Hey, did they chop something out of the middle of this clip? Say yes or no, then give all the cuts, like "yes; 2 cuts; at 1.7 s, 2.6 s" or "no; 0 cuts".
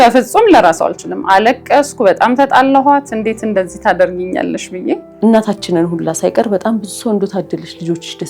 yes; 1 cut; at 5.1 s